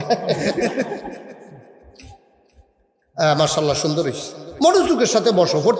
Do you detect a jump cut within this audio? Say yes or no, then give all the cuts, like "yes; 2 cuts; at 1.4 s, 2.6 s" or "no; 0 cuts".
no; 0 cuts